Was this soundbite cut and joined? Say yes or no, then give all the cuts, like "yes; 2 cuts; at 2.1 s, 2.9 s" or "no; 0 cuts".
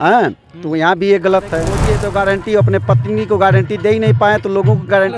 yes; 1 cut; at 1.8 s